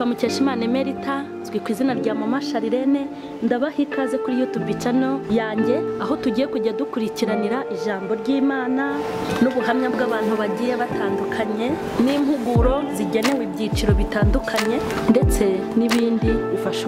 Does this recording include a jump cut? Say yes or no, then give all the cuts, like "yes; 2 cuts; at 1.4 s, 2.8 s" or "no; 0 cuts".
no; 0 cuts